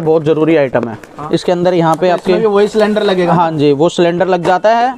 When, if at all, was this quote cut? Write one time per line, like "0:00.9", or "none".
0:01.1